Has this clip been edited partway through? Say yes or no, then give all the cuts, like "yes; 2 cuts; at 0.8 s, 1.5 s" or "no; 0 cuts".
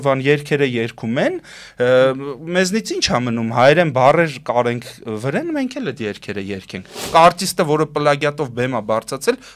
yes; 1 cut; at 7.0 s